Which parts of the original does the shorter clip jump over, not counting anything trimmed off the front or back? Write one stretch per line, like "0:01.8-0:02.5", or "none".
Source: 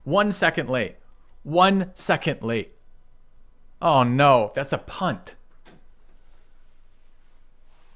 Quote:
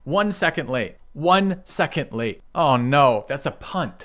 0:01.0-0:01.3
0:02.7-0:03.7